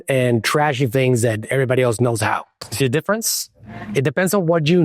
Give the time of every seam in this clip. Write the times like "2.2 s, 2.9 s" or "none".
2.5 s